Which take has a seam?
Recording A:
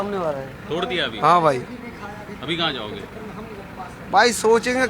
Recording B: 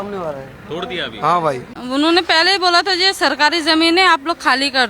B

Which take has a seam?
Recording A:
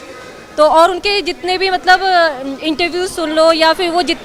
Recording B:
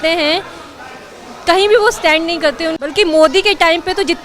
B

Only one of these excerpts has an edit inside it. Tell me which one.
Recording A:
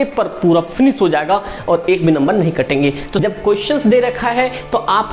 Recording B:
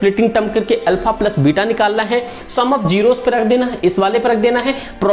A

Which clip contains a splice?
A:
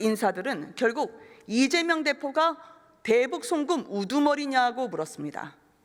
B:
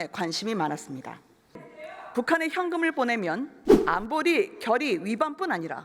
B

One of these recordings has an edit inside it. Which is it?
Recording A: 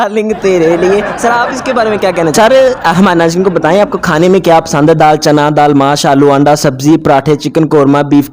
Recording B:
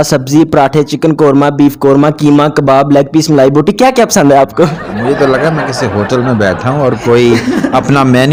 A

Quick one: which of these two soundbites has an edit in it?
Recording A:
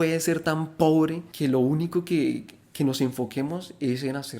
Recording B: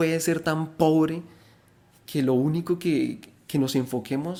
A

